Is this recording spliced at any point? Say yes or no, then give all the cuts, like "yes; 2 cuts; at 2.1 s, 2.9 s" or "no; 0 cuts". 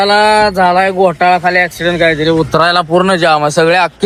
no; 0 cuts